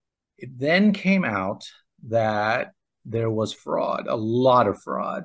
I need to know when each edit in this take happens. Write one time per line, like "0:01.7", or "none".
none